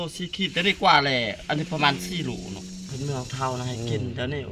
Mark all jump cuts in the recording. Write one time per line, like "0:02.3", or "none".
0:02.9